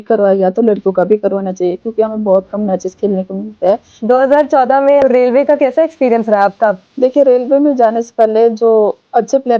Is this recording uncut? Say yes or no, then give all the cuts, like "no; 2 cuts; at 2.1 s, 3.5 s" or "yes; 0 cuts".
no; 3 cuts; at 3.9 s, 5.0 s, 6.8 s